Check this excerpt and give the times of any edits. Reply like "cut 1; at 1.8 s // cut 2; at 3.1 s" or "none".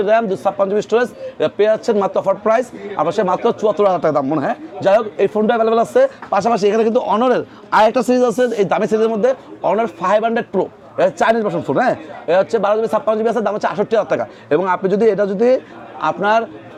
none